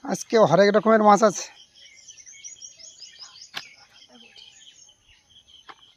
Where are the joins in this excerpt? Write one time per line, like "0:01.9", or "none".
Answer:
none